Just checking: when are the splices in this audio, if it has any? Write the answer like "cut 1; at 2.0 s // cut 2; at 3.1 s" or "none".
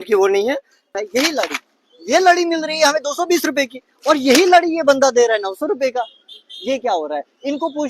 cut 1; at 0.9 s